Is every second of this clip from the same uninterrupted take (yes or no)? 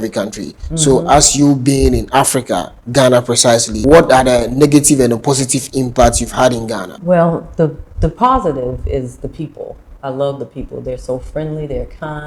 no